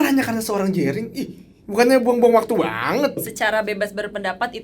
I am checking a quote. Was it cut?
yes; 1 cut; at 3.2 s

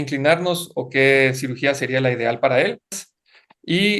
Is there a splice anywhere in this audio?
yes; 1 cut; at 3.0 s

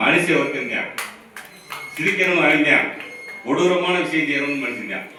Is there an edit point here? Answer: no; 0 cuts

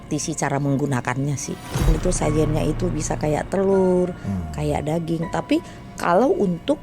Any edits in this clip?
yes; 1 cut; at 1.9 s

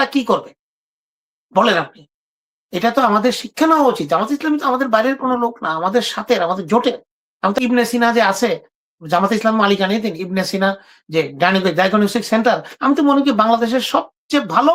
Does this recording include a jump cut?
yes; 1 cut; at 7.5 s

